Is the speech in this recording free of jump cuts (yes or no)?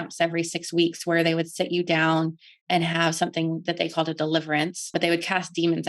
no